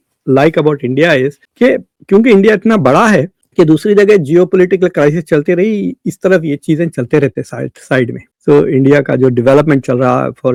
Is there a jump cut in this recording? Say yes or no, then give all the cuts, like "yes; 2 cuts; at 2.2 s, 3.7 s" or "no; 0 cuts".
no; 0 cuts